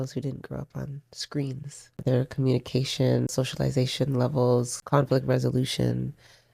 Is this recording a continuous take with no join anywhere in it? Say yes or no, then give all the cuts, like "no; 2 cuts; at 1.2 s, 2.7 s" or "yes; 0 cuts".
no; 3 cuts; at 2.0 s, 3.3 s, 4.8 s